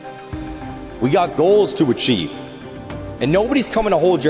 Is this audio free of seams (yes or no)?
no